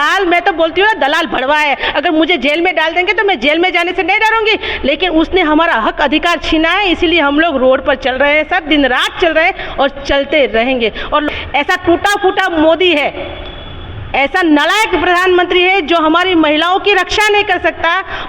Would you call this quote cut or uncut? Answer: cut